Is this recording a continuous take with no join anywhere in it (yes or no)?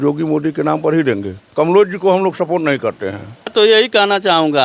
no